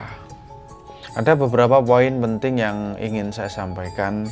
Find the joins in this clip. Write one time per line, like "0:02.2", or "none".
none